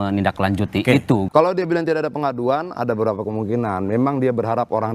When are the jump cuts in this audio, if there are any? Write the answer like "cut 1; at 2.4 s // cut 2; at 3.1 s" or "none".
cut 1; at 1.3 s